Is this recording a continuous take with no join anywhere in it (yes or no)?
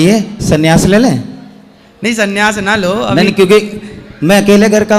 yes